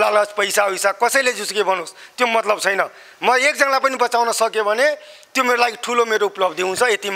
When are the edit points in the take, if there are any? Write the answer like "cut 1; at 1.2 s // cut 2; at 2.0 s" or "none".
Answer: none